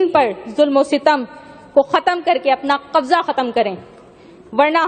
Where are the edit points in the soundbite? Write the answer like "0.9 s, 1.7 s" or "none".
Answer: none